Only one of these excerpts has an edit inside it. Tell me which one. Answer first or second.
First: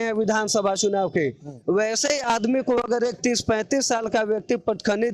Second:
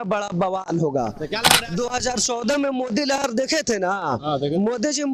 second